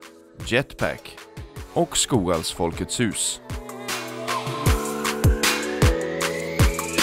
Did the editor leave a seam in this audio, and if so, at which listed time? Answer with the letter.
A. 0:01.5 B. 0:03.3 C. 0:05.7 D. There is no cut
B